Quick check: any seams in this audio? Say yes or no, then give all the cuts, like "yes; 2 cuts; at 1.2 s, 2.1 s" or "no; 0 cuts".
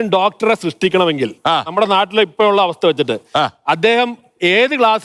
no; 0 cuts